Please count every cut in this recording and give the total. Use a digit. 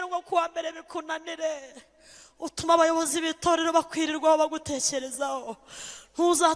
0